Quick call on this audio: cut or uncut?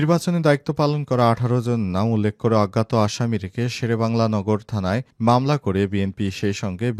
uncut